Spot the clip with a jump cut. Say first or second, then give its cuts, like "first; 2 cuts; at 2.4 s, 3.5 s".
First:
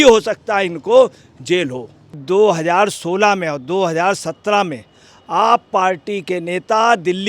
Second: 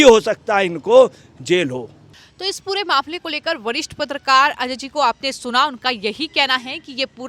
first; 1 cut; at 2.1 s